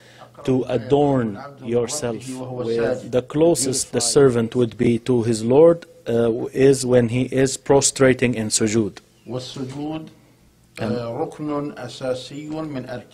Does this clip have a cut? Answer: yes; 1 cut; at 2.9 s

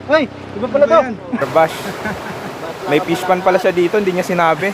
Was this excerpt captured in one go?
no; 1 cut; at 1.4 s

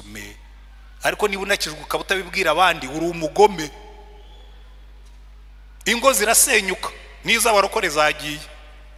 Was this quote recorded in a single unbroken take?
yes; 0 cuts

